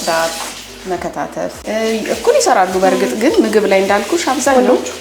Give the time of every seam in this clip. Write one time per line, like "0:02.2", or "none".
0:01.6